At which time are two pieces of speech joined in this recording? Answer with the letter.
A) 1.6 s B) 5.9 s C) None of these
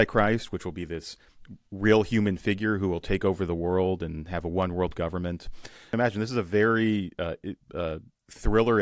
B